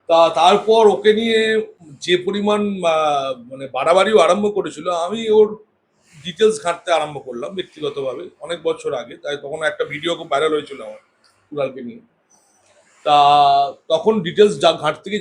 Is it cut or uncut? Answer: uncut